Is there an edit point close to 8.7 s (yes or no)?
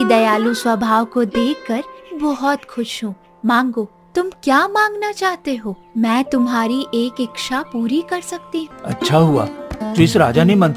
yes